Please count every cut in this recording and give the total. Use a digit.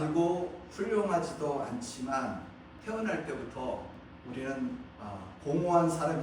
2